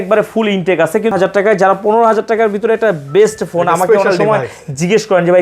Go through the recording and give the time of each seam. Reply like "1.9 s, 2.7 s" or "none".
1.1 s

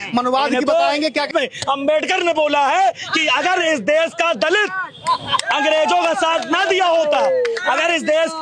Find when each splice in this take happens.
1.3 s

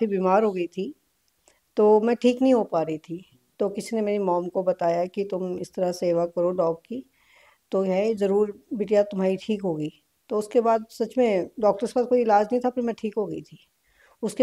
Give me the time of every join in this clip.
none

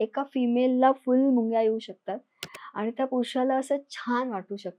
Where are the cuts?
none

